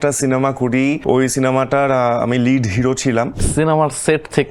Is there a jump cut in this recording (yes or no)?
yes